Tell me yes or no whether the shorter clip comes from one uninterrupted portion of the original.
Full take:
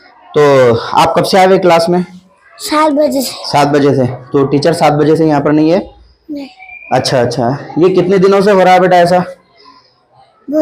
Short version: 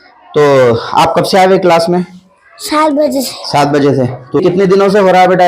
no